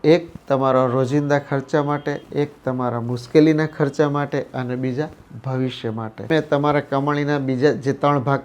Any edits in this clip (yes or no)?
yes